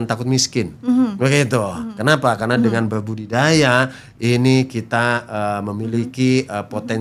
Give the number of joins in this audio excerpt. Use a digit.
0